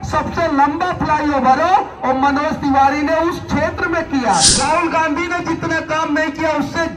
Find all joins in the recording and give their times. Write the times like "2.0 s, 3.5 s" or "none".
4.5 s